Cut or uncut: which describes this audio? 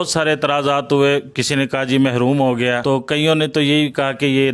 cut